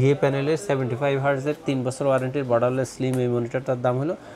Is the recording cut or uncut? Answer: uncut